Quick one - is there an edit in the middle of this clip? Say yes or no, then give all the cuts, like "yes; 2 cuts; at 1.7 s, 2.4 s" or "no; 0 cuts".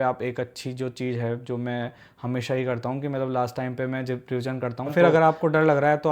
yes; 1 cut; at 4.9 s